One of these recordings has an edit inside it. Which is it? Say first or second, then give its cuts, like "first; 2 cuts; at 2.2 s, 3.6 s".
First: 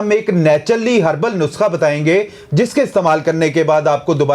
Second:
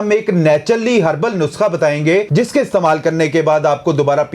second; 1 cut; at 2.3 s